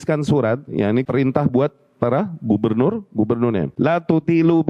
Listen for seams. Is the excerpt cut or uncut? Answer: cut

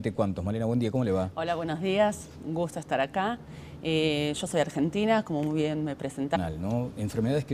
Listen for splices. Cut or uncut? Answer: uncut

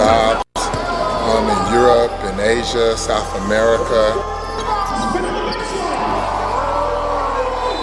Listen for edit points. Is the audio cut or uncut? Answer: cut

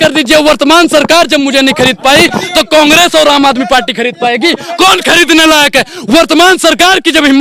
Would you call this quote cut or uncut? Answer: uncut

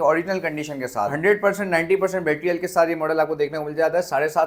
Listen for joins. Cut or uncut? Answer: uncut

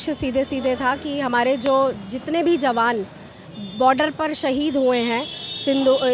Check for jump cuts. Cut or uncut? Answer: uncut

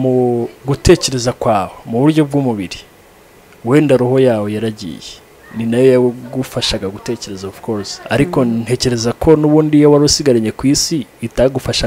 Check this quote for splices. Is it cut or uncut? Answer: uncut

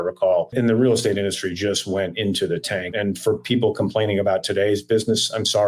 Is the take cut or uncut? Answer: cut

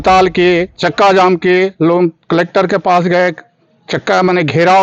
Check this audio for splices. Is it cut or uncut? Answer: uncut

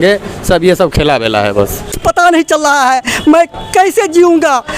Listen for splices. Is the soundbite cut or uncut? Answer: cut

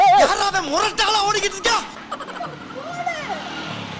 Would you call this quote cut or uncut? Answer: uncut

